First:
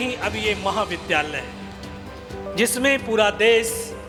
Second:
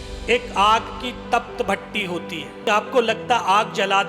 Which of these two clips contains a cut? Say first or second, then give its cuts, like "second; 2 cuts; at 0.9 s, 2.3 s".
second; 1 cut; at 2.7 s